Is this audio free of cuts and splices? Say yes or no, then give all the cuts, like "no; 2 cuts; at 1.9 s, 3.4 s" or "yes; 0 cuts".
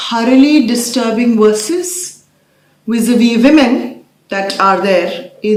yes; 0 cuts